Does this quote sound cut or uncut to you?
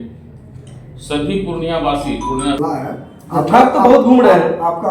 cut